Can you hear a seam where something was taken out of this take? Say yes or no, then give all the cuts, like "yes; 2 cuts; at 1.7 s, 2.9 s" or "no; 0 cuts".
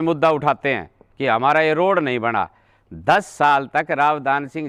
no; 0 cuts